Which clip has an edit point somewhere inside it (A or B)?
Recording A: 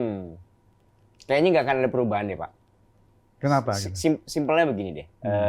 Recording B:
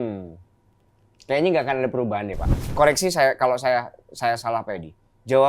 B